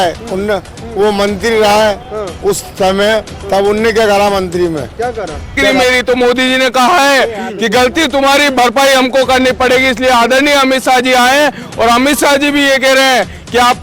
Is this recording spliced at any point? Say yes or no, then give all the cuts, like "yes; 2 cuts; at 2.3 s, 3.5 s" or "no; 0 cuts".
yes; 1 cut; at 5.6 s